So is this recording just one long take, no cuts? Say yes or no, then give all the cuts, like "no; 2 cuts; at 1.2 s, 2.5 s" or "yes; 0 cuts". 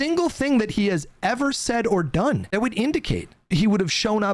no; 2 cuts; at 2.5 s, 3.4 s